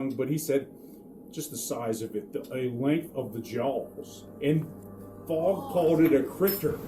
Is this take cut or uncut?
cut